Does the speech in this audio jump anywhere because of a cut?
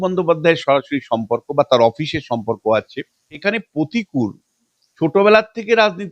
yes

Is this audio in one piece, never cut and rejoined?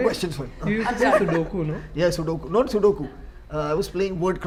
yes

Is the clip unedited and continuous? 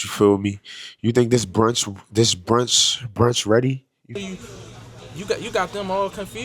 no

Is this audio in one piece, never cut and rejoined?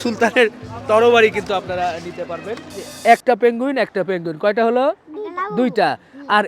no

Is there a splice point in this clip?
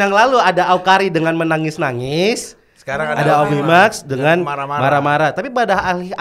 no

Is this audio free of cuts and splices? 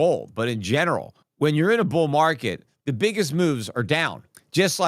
no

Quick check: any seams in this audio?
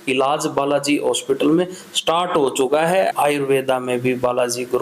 yes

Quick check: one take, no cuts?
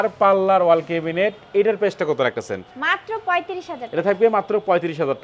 yes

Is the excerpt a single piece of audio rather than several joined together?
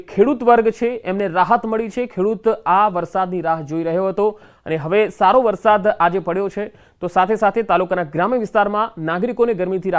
no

